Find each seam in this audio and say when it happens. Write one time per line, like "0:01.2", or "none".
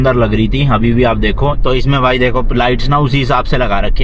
none